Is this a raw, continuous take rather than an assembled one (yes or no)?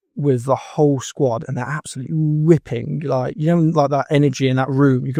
yes